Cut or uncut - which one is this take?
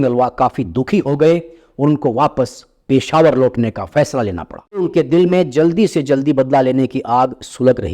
cut